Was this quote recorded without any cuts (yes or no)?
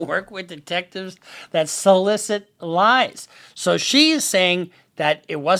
yes